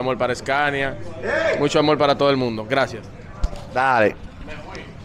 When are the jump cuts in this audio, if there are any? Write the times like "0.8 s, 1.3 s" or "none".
none